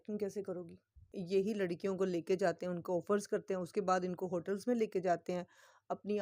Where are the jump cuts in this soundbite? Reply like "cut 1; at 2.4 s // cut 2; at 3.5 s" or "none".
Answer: cut 1; at 1.1 s